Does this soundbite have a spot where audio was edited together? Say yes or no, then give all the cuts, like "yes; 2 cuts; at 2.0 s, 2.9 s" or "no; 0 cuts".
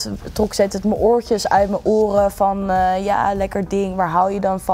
no; 0 cuts